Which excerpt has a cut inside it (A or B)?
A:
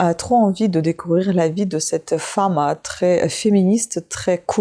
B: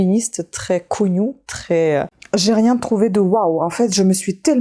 B